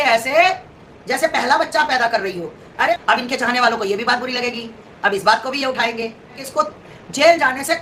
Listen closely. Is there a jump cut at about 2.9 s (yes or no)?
yes